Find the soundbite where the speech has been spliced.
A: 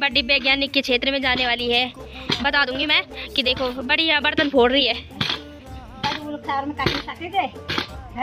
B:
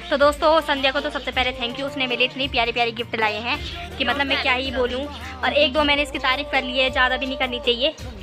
A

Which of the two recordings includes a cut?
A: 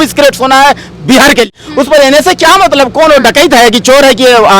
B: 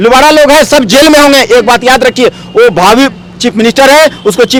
A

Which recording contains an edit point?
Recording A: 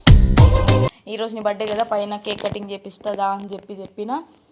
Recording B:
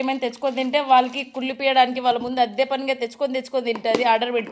A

